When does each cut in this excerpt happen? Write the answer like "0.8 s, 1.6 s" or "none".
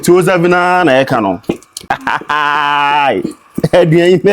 1.7 s